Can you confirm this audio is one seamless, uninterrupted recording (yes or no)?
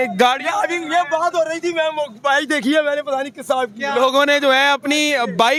yes